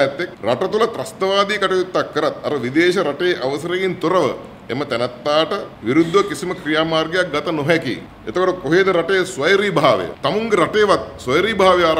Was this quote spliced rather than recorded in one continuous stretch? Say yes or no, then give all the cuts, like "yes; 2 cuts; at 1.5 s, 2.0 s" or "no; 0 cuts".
yes; 1 cut; at 10.2 s